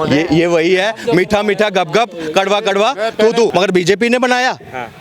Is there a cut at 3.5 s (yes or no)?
yes